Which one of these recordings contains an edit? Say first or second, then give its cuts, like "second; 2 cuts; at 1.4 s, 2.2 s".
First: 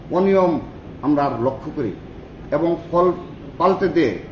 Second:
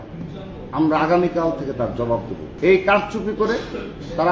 second; 1 cut; at 2.4 s